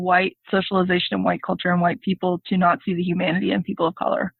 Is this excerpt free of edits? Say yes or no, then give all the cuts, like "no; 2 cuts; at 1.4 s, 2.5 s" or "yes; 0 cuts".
yes; 0 cuts